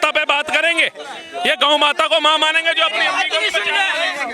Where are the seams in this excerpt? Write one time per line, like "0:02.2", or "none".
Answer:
none